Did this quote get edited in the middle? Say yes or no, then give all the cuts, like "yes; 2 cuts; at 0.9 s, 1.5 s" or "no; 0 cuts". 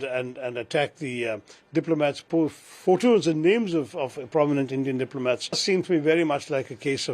yes; 1 cut; at 5.6 s